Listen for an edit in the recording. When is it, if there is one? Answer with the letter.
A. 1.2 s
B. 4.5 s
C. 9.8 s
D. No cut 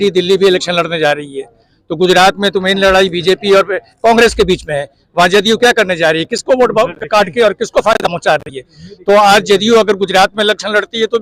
D